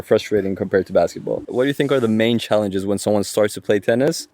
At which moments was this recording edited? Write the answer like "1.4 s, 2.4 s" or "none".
1.4 s